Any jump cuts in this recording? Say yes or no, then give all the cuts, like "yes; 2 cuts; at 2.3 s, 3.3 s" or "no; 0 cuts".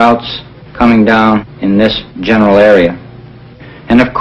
no; 0 cuts